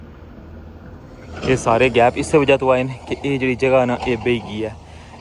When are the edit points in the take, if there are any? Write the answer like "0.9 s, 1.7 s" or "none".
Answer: none